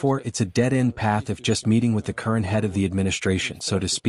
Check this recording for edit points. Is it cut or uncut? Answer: uncut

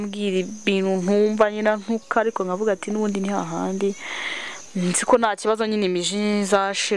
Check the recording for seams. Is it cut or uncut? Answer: uncut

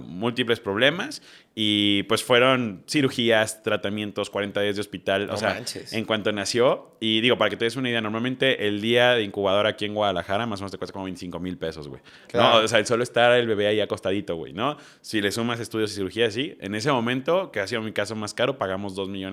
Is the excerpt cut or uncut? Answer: uncut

